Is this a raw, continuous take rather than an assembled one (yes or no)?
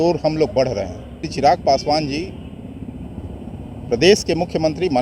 no